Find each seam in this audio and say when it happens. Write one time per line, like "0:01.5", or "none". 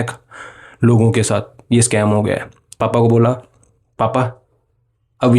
0:02.8